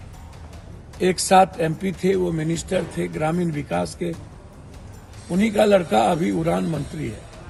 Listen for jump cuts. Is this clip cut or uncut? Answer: uncut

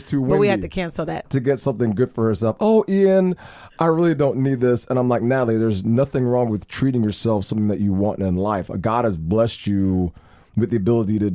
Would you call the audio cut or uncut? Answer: cut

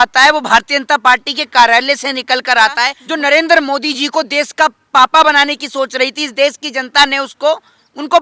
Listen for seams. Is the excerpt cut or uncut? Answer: cut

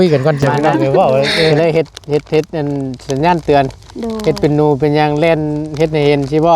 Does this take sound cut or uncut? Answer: cut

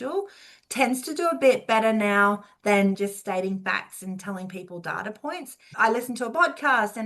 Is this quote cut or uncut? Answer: cut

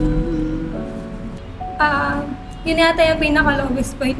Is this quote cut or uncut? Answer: cut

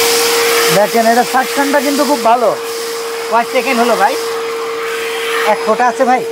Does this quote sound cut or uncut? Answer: uncut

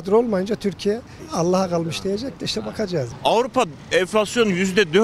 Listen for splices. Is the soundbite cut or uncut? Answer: cut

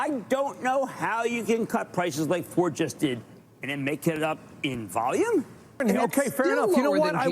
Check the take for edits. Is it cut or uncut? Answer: cut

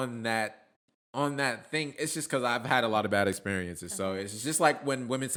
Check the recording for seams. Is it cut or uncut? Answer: uncut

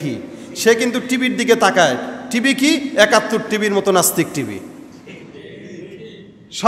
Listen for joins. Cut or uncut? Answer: uncut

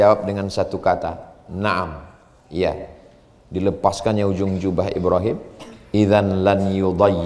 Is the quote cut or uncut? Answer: uncut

